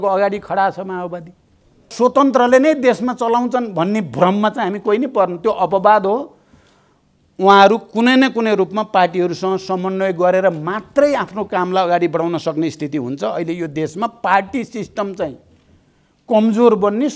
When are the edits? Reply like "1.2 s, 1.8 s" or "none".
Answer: 1.9 s